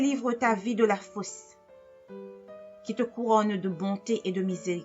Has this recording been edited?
yes; 2 cuts; at 1.3 s, 2.8 s

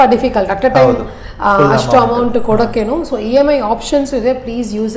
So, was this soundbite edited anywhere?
no; 0 cuts

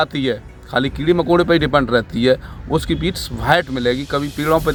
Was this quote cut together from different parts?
no; 0 cuts

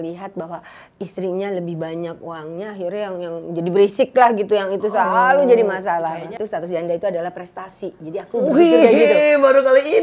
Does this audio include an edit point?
yes; 1 cut; at 6.1 s

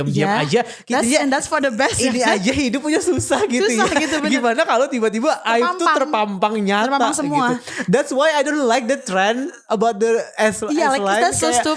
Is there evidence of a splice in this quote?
no; 0 cuts

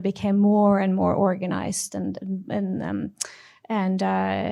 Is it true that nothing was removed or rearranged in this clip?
yes; 0 cuts

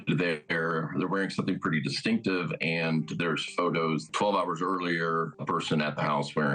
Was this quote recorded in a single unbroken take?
no; 2 cuts; at 4.0 s, 5.4 s

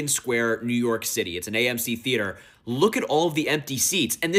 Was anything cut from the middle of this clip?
no; 0 cuts

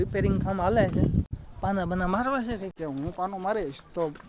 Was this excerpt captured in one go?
no; 2 cuts; at 1.4 s, 2.7 s

